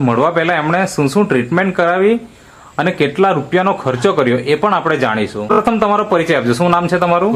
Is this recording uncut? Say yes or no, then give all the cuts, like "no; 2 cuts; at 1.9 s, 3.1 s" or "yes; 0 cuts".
no; 1 cut; at 5.5 s